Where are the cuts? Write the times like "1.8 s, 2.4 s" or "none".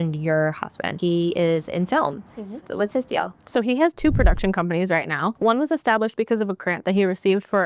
0.9 s, 2.7 s, 5.4 s